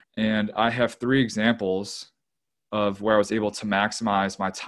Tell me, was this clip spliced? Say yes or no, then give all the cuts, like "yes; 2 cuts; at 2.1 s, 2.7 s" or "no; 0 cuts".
no; 0 cuts